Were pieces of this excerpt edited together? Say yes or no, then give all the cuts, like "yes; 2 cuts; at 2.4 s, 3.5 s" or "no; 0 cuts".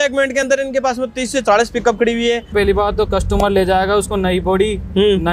yes; 1 cut; at 2.5 s